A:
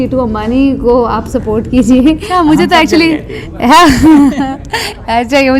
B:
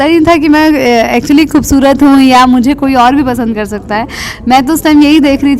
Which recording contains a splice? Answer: A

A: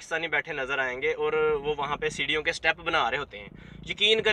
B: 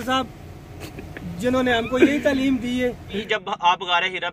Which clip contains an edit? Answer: B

